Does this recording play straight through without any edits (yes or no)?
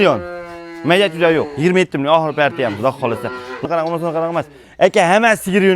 no